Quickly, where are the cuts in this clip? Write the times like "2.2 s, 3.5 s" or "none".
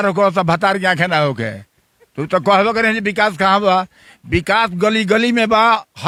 none